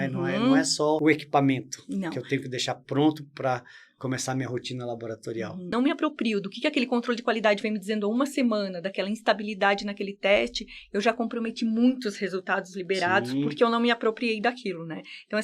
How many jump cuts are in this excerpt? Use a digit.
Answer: 2